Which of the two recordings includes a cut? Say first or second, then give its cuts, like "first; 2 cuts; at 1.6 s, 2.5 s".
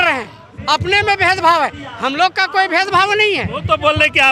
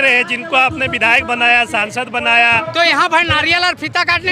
second; 1 cut; at 2.7 s